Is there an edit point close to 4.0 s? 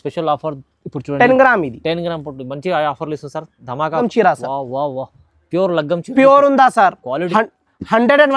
yes; 1 cut; at 4.0 s

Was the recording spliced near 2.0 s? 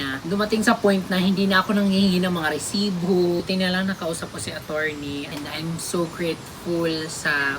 no; 2 cuts; at 3.4 s, 5.3 s

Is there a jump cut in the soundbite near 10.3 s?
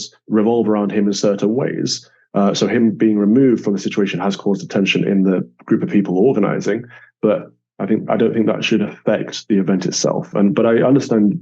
no; 0 cuts

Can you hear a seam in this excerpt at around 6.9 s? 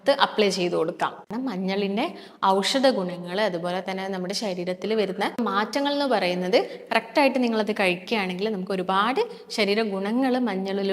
no; 1 cut; at 1.3 s

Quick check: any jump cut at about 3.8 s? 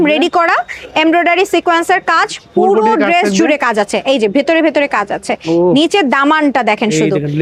no; 0 cuts

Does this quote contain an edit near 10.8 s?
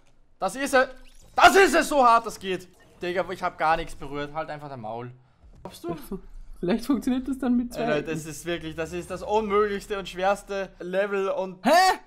yes; 1 cut; at 10.8 s

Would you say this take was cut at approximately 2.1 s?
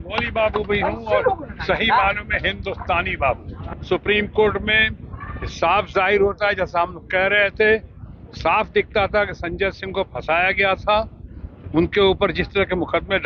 no; 1 cut; at 3.5 s

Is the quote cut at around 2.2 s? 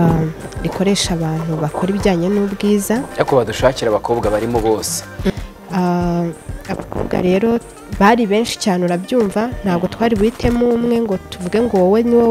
no; 1 cut; at 5.3 s

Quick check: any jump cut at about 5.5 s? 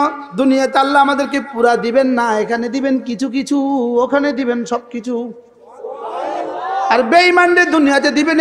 no; 0 cuts

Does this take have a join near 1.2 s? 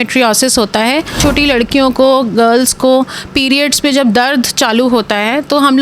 yes; 1 cut; at 1.2 s

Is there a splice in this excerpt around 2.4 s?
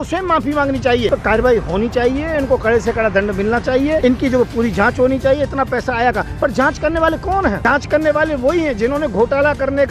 no; 3 cuts; at 1.1 s, 4.0 s, 7.6 s

